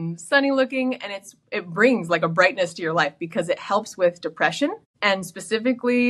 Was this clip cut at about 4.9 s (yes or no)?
yes